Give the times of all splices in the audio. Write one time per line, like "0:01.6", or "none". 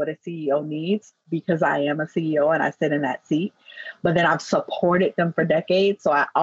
none